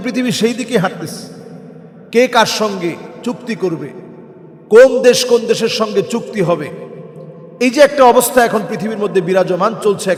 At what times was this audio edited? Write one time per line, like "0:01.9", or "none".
none